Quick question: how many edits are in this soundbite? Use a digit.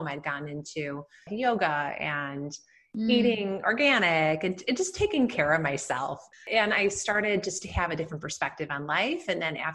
2